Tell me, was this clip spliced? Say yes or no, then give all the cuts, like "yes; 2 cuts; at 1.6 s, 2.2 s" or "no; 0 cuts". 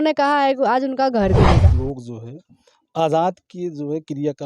yes; 1 cut; at 1.7 s